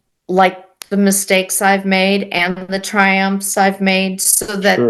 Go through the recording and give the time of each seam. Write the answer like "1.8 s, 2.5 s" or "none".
none